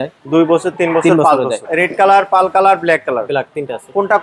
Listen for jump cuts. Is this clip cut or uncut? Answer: cut